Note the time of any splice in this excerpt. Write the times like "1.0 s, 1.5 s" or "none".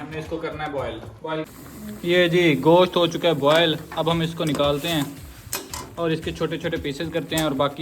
1.4 s